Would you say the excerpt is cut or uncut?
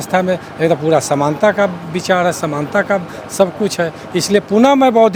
uncut